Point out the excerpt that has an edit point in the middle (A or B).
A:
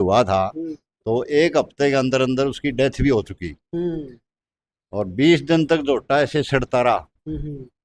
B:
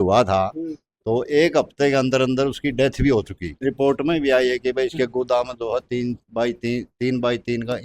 B